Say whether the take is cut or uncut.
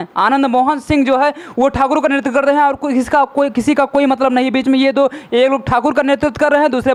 uncut